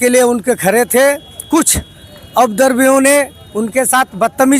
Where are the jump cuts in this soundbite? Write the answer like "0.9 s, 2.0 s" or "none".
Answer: none